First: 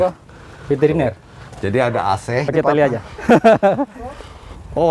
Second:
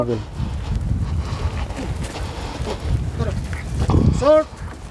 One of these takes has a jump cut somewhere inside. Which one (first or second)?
first